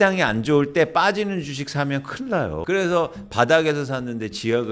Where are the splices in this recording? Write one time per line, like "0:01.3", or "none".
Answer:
0:02.6